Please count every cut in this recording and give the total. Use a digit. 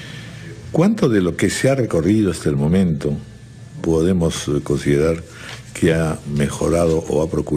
1